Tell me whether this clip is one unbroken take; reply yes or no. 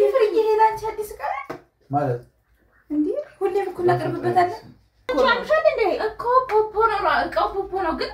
no